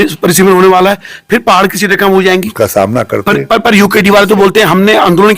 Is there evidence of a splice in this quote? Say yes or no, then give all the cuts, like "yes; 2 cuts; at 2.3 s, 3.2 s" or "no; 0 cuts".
yes; 1 cut; at 2.5 s